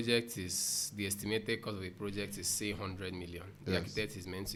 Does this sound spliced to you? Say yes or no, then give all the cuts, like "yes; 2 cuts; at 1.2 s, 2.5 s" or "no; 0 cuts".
no; 0 cuts